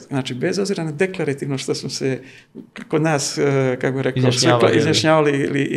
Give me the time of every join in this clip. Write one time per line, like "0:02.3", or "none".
none